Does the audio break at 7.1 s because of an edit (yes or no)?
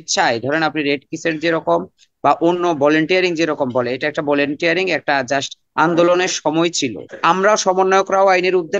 yes